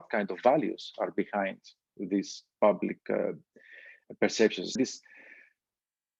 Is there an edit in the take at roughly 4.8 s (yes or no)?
yes